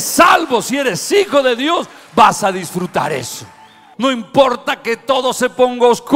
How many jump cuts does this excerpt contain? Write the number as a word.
one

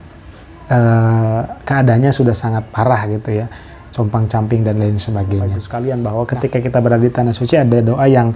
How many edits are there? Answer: one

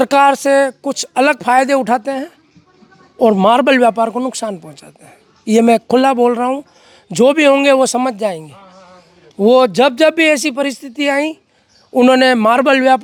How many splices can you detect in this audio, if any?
zero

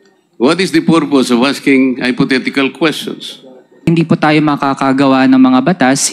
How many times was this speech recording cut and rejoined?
one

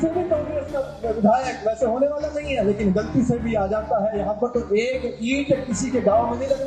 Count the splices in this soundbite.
zero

